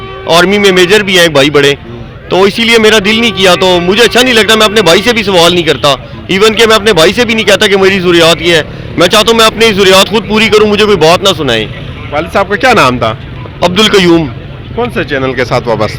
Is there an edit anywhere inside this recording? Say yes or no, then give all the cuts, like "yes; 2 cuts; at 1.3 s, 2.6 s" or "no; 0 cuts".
no; 0 cuts